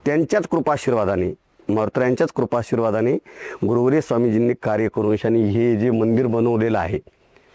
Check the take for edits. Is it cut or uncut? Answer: uncut